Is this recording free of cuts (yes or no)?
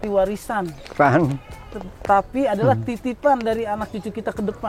yes